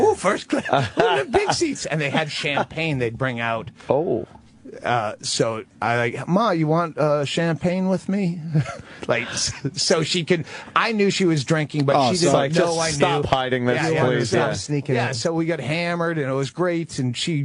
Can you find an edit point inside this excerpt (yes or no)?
no